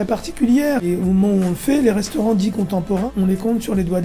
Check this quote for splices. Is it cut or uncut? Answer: cut